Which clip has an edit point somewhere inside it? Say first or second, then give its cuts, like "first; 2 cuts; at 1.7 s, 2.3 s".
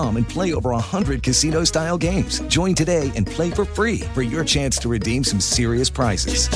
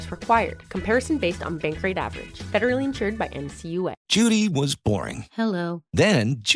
second; 1 cut; at 4.0 s